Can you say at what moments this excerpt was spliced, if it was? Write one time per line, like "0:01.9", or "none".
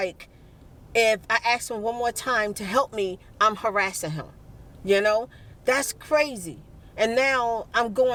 none